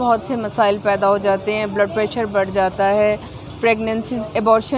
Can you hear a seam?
no; 0 cuts

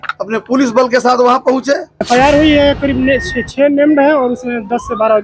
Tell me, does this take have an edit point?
yes; 1 cut; at 1.9 s

